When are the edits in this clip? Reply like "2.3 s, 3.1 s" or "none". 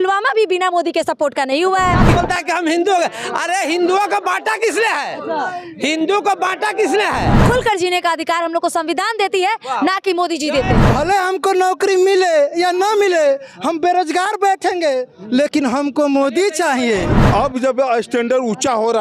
2.1 s, 7.3 s, 10.8 s, 17.1 s